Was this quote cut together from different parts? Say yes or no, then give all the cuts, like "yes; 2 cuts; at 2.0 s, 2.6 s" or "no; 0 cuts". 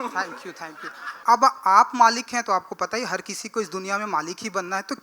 yes; 1 cut; at 1.2 s